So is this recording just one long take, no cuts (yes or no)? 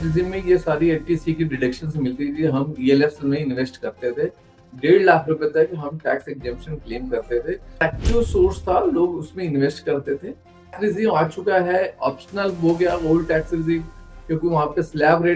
no